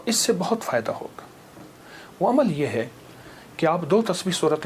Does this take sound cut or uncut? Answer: uncut